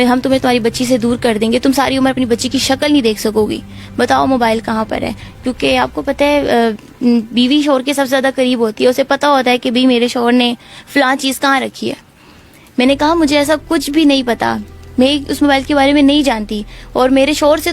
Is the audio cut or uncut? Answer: uncut